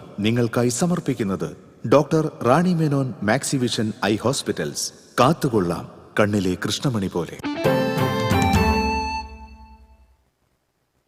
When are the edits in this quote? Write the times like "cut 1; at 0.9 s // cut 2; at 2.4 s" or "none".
none